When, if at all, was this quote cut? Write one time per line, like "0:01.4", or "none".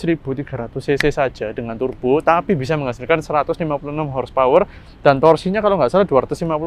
none